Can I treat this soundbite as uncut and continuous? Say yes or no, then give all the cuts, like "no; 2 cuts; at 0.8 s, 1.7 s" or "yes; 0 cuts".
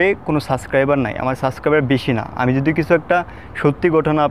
yes; 0 cuts